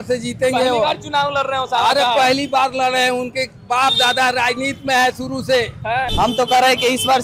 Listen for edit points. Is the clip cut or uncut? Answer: cut